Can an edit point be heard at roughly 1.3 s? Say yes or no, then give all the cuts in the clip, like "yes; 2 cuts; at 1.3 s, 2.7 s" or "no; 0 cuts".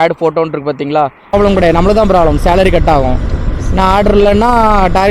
yes; 1 cut; at 1.3 s